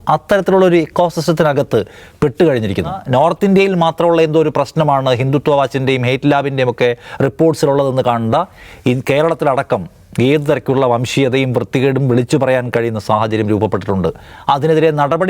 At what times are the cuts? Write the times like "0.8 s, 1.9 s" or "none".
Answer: 3.0 s